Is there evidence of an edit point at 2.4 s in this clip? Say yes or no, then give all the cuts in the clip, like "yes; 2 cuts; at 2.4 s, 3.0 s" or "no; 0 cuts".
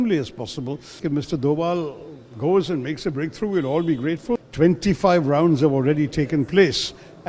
no; 2 cuts; at 1.0 s, 4.4 s